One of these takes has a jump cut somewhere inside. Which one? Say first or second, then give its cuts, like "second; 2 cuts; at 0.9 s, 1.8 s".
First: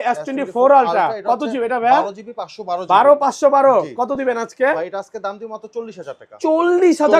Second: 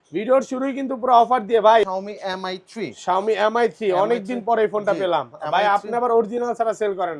second; 1 cut; at 1.8 s